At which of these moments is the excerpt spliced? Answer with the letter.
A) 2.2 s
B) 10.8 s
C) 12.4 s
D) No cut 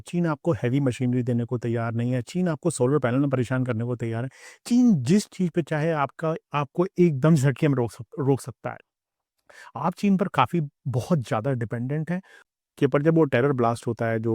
C